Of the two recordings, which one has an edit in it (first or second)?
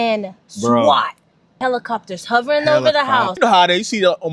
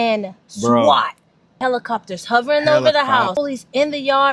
first